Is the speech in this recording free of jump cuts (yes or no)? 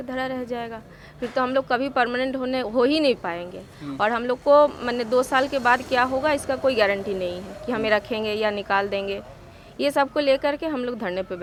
yes